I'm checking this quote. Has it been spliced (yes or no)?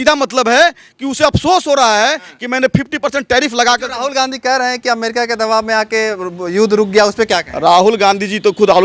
no